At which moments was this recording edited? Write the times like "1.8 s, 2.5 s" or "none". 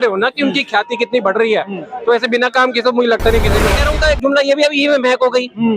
3.8 s